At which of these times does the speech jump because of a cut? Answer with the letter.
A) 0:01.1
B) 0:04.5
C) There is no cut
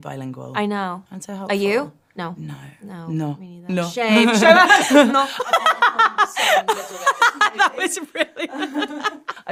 C